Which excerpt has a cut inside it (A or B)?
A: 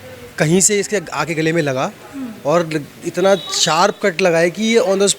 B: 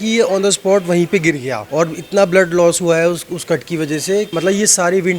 B